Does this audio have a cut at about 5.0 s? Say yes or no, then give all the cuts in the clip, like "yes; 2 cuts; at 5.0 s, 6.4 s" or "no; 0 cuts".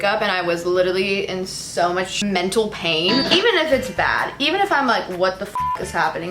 no; 2 cuts; at 2.1 s, 3.3 s